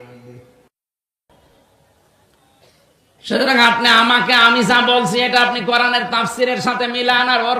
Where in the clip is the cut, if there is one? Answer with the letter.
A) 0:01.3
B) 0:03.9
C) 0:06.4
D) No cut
A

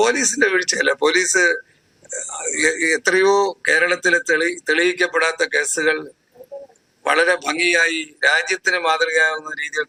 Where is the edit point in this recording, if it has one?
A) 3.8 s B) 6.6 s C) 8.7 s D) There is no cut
D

